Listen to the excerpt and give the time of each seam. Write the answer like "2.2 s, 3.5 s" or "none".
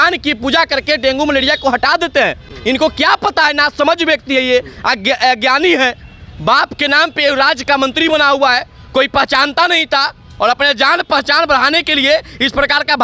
none